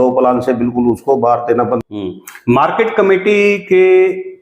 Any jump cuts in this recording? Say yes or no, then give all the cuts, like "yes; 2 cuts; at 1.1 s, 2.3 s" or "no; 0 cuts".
yes; 1 cut; at 1.8 s